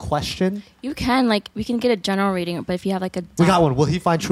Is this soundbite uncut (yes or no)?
no